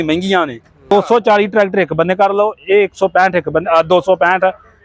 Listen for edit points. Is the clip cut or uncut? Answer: cut